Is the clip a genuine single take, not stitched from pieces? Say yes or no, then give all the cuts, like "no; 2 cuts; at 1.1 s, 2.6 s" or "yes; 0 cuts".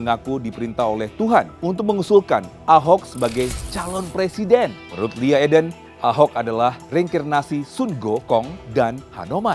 no; 5 cuts; at 1.5 s, 4.8 s, 5.8 s, 6.8 s, 8.6 s